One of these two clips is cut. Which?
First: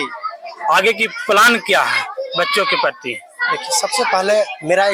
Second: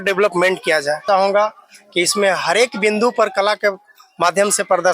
second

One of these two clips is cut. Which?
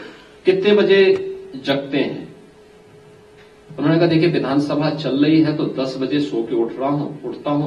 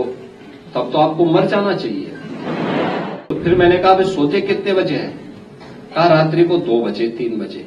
second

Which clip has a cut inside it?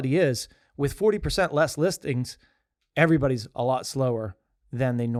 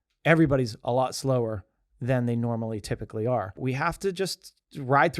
second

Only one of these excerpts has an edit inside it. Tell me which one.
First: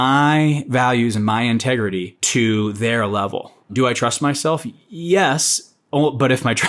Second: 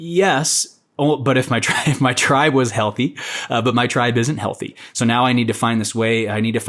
first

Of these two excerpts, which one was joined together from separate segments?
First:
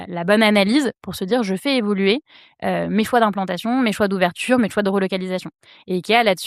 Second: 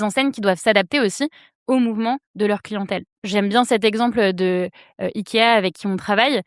second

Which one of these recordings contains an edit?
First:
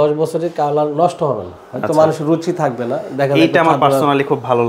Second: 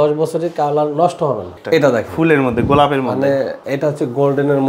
second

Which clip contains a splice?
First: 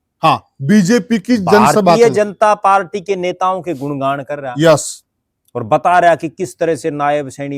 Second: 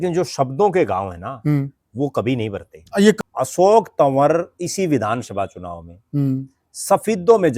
second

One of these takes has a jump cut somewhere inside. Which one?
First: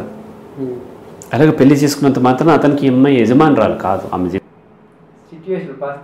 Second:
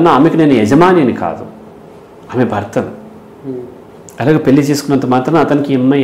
first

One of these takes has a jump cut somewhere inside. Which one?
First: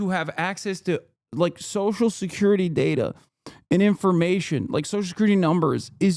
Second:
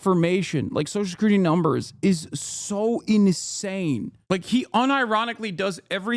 second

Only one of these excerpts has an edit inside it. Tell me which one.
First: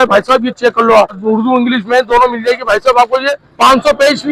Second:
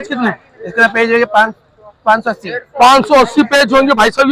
first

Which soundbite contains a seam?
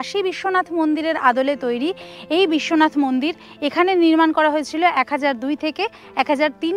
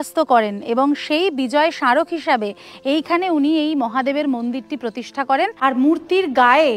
second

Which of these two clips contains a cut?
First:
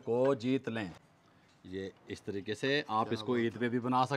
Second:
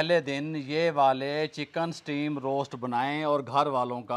first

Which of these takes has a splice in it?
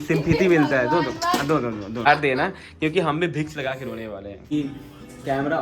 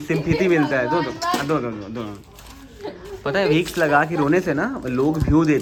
first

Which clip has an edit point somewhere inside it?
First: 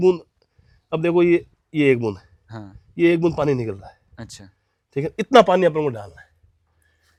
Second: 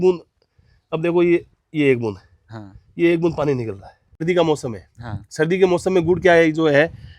second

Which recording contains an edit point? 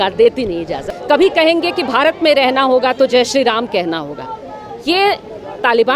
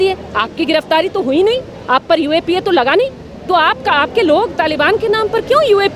first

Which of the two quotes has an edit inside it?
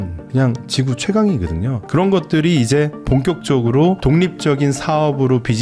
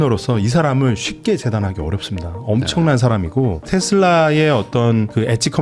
second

